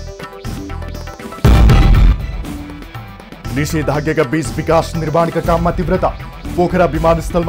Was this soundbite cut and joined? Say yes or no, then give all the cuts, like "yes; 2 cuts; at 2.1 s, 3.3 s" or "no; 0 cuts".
yes; 1 cut; at 3.5 s